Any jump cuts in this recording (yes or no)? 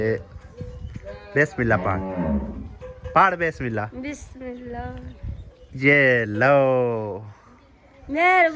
no